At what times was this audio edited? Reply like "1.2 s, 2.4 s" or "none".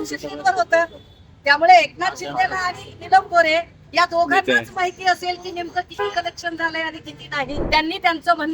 7.6 s